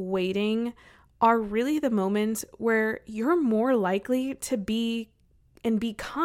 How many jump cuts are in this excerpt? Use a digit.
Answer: 0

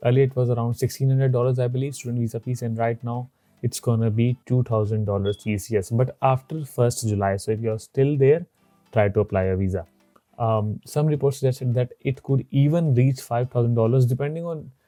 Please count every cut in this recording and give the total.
0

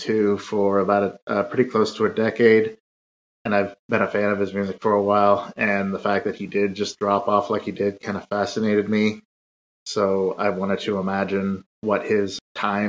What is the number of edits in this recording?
1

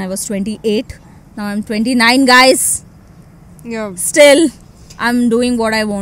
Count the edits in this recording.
0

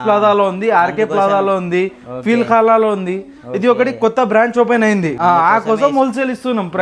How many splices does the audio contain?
1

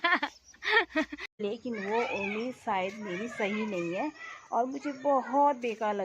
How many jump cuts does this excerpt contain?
1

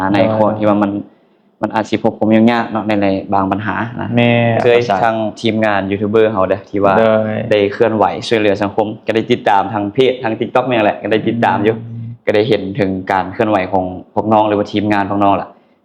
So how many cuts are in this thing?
1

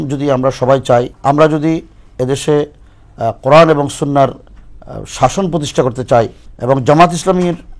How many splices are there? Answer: 2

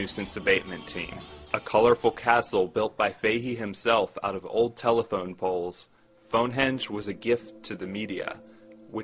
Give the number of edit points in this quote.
1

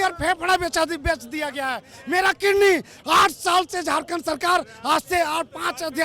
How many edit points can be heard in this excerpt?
0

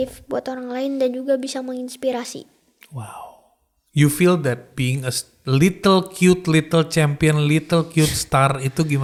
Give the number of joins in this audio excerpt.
0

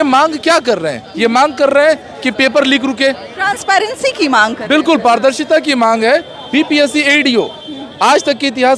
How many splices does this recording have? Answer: 0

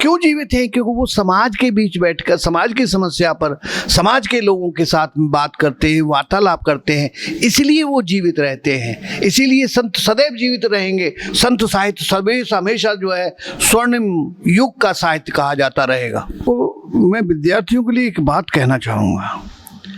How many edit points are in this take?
1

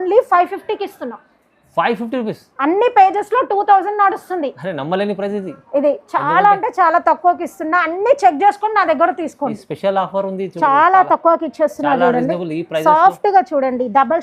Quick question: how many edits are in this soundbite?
1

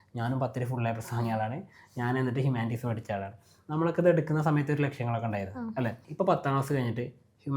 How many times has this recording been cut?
1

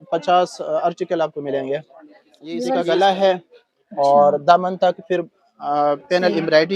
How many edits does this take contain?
1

